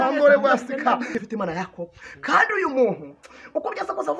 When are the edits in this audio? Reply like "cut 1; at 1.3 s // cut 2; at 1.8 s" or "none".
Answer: cut 1; at 1.2 s